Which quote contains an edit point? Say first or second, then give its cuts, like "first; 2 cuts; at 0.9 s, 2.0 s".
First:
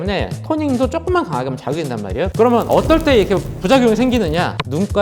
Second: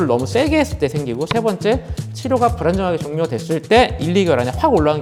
first; 1 cut; at 2.3 s